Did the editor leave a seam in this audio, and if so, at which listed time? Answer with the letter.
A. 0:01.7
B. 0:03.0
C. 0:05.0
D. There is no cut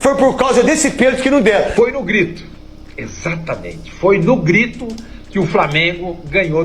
A